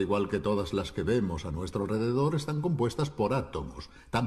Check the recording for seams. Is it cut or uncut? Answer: uncut